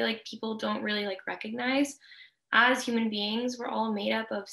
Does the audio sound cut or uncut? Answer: uncut